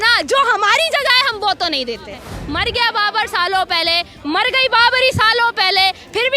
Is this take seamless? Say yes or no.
no